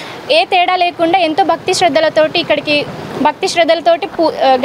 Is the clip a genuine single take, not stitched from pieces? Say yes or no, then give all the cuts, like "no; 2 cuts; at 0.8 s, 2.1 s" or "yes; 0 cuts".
no; 1 cut; at 3.0 s